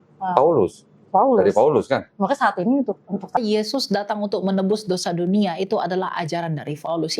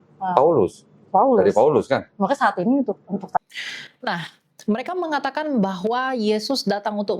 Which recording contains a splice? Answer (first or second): first